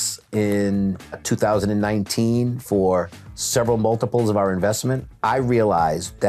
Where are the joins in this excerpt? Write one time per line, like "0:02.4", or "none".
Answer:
0:01.2
0:05.0